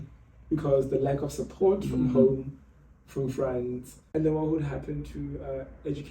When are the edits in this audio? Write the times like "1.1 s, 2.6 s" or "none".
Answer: 3.9 s